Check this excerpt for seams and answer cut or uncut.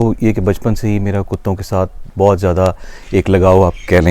uncut